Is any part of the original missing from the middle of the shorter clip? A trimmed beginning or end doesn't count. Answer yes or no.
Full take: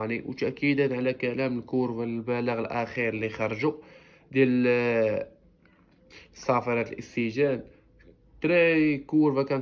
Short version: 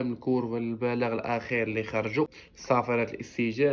yes